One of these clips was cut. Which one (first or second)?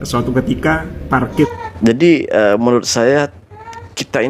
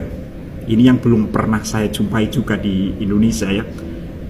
first